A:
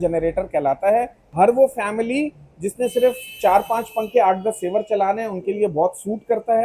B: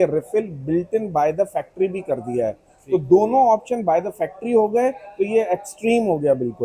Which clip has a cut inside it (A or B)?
A